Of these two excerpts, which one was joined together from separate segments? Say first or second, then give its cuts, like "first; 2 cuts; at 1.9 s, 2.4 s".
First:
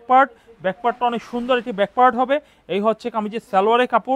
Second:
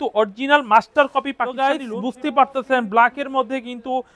second; 1 cut; at 1.5 s